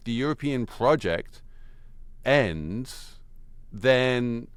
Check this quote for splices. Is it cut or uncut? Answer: uncut